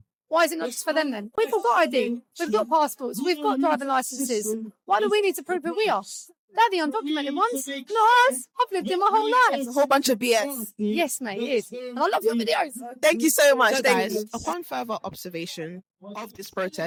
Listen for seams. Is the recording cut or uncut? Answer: uncut